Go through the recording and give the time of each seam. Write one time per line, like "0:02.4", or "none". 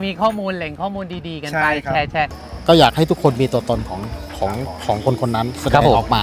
0:02.4

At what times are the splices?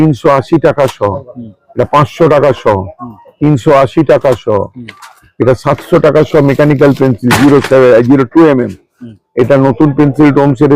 none

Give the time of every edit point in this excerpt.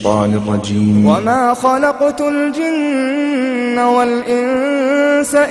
0:01.2

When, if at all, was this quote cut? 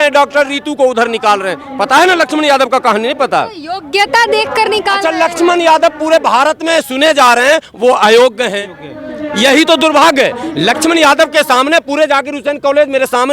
none

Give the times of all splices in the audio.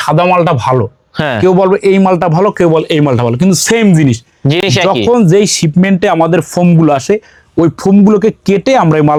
none

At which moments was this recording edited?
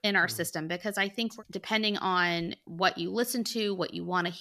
0:01.4
0:02.6

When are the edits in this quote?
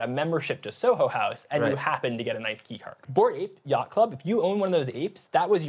0:03.0

